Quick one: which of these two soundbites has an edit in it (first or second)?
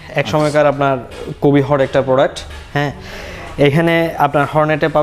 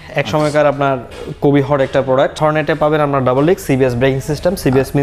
second